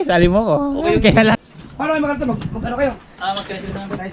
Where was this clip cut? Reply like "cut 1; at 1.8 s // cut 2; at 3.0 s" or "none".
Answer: cut 1; at 1.4 s